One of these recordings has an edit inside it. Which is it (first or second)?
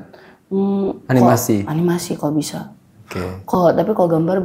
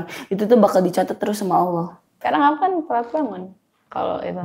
second